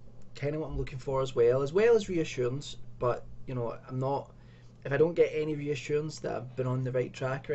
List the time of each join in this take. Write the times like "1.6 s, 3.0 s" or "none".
4.2 s